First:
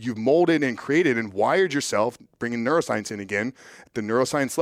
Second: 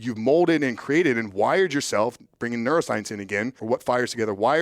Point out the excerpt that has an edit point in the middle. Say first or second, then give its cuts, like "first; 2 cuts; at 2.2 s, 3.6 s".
second; 1 cut; at 3.6 s